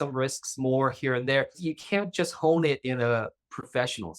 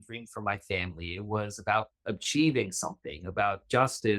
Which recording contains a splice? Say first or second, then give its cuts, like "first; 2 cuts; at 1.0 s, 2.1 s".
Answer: first; 1 cut; at 1.6 s